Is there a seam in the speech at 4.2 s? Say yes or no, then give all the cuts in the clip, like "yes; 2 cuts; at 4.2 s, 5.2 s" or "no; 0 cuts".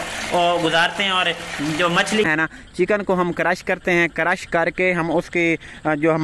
no; 1 cut; at 2.3 s